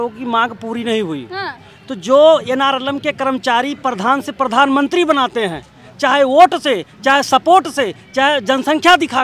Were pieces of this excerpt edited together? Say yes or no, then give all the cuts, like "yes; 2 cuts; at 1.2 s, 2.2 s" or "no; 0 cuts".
no; 0 cuts